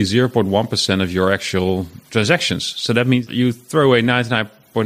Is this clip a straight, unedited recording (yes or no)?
no